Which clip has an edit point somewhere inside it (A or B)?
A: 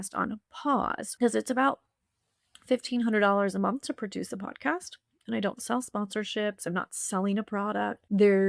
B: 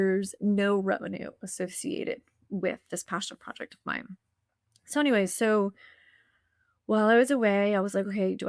A